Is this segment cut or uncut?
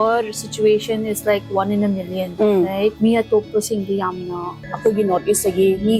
cut